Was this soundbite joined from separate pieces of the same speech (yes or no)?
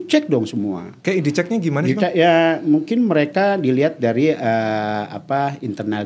no